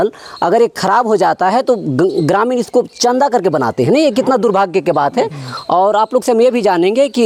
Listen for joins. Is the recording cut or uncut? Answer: uncut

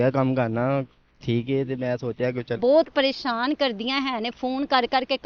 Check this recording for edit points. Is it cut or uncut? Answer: cut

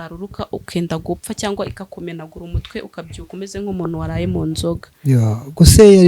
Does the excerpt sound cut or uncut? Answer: uncut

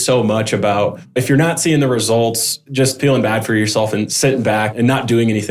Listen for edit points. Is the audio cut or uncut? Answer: cut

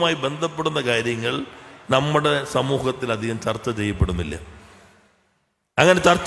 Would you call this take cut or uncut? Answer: uncut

